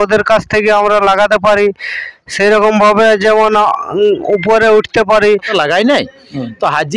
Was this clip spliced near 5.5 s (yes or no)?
yes